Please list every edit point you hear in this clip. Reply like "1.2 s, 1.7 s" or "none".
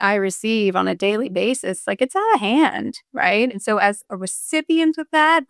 3.5 s